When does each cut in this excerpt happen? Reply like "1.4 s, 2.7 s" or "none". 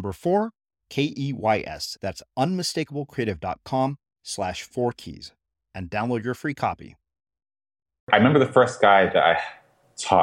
8.1 s